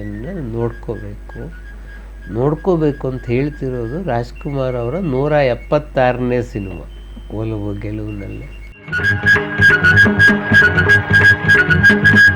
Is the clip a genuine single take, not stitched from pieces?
yes; 0 cuts

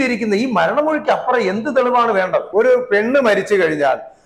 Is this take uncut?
no; 1 cut; at 2.5 s

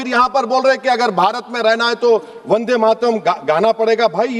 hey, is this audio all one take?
yes; 0 cuts

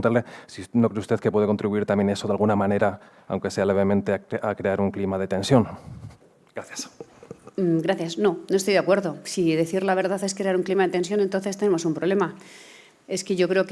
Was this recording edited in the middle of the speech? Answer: no; 0 cuts

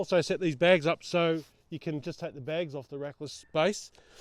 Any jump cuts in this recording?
no; 0 cuts

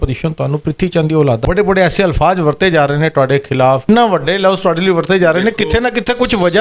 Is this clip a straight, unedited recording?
no; 2 cuts; at 1.4 s, 3.9 s

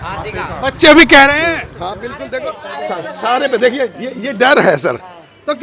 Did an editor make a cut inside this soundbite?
yes; 1 cut; at 2.2 s

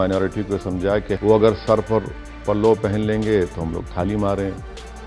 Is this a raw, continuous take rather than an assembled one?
no; 1 cut; at 1.2 s

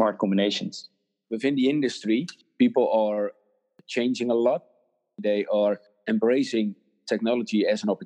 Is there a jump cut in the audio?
yes; 1 cut; at 0.9 s

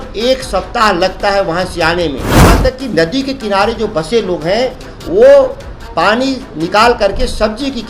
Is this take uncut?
no; 1 cut; at 2.5 s

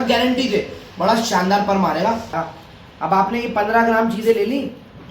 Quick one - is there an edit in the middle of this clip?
yes; 1 cut; at 2.4 s

